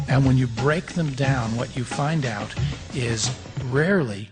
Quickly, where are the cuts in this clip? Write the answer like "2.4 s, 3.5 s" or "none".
2.5 s